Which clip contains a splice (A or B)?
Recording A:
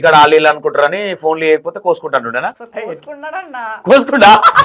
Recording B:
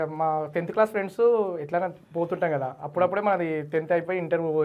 A